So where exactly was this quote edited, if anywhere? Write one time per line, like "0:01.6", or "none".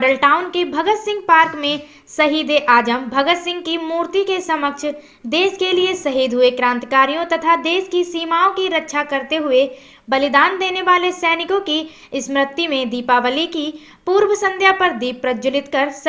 none